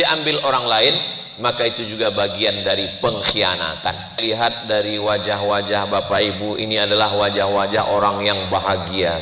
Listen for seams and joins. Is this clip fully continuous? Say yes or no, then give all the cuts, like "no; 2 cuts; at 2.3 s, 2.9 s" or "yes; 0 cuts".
no; 1 cut; at 4.2 s